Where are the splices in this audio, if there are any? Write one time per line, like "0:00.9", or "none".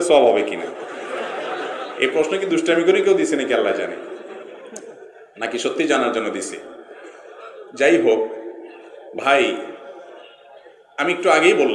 none